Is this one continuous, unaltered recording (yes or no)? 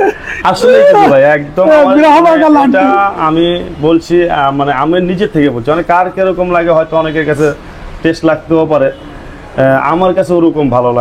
yes